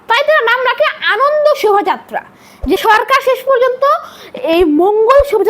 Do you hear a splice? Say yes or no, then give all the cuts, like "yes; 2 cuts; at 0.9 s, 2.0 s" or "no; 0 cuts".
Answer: yes; 1 cut; at 2.8 s